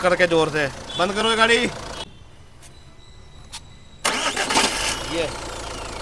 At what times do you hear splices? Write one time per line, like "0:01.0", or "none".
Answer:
0:02.0